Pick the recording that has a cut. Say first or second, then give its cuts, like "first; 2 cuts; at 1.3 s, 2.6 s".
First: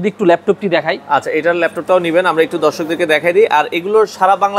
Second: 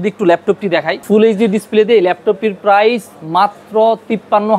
second; 1 cut; at 1.0 s